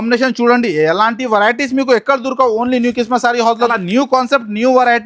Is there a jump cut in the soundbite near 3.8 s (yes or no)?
yes